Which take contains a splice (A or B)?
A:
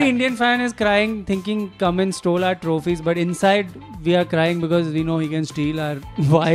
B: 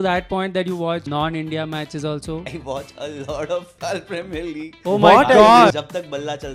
B